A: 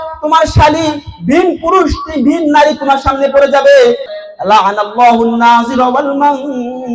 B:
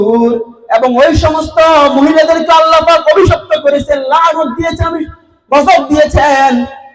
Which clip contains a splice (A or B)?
A